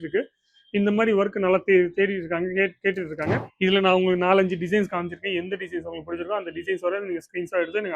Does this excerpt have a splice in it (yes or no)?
yes